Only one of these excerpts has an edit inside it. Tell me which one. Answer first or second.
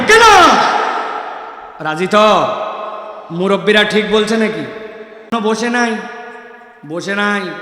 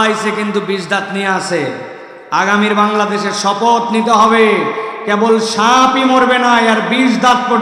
first